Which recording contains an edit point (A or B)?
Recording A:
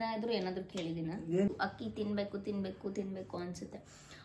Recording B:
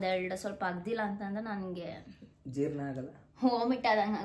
A